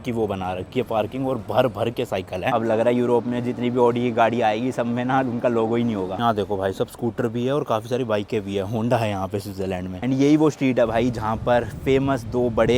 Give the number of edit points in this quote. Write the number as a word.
three